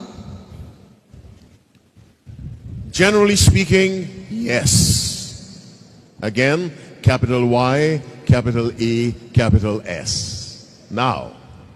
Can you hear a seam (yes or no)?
no